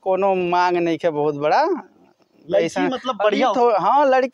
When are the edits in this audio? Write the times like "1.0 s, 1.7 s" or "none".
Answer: none